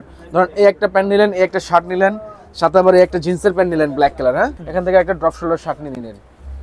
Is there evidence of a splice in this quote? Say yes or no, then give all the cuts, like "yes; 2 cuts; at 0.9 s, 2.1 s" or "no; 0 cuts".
yes; 1 cut; at 4.6 s